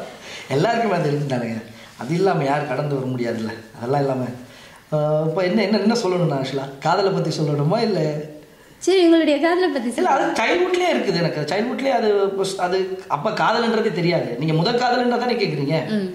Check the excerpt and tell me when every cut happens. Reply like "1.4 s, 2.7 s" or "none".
none